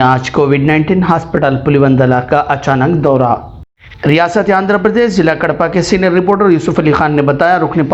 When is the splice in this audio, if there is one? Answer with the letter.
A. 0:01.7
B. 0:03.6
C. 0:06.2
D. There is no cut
D